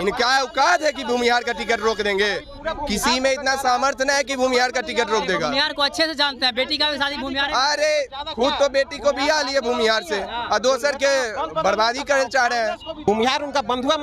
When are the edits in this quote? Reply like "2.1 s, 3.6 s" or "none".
12.9 s